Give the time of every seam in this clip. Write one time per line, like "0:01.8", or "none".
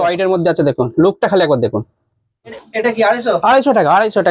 0:02.6